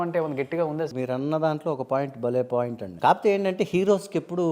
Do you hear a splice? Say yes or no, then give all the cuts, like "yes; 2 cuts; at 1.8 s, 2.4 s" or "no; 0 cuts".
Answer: yes; 2 cuts; at 0.9 s, 2.8 s